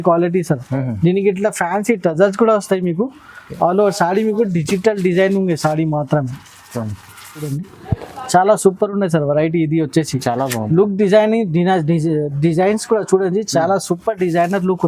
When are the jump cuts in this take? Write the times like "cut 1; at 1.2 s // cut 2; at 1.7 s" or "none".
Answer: cut 1; at 7.5 s